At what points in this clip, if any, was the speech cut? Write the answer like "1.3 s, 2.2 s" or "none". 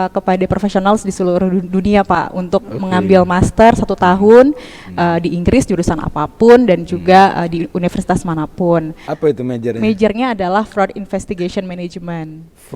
9.0 s